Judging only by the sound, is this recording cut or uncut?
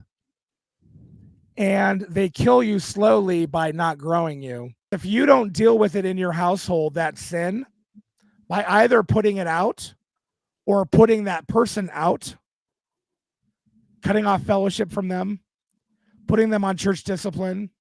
cut